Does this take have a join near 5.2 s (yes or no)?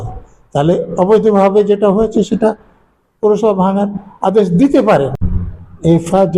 yes